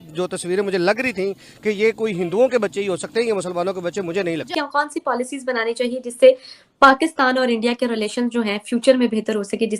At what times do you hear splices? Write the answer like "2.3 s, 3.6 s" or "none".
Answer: 4.4 s